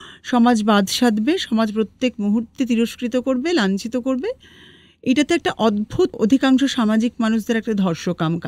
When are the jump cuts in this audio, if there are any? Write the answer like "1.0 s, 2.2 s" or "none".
6.1 s